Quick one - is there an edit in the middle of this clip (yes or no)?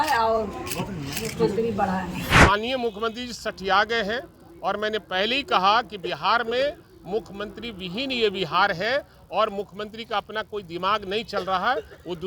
yes